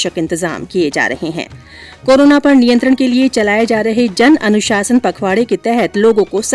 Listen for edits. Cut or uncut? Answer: uncut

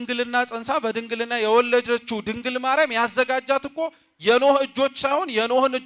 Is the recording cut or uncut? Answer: uncut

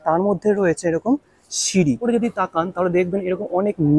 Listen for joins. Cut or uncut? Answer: cut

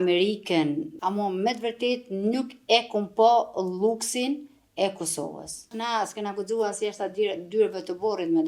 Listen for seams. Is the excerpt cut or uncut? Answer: cut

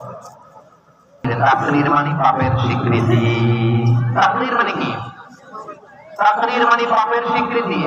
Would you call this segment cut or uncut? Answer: cut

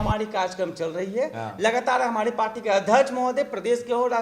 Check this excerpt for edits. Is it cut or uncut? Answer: uncut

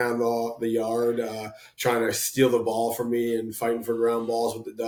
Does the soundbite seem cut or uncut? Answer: uncut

